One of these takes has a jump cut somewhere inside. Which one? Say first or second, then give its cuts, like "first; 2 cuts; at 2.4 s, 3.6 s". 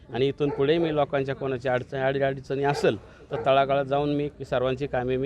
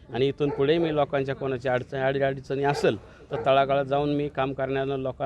first; 1 cut; at 4.3 s